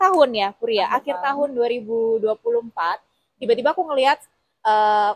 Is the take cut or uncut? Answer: uncut